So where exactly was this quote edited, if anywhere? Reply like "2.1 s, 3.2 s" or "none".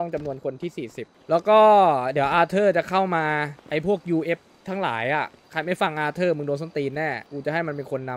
1.1 s, 3.6 s, 5.4 s, 7.3 s